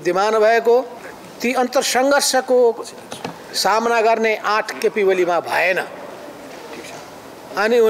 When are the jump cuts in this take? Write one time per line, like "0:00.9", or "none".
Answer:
0:01.0